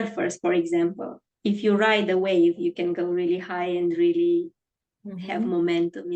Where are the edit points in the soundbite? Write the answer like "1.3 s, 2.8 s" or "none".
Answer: none